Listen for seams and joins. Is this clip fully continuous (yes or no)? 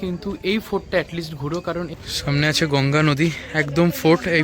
no